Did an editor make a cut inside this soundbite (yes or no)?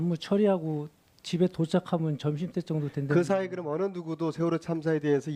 yes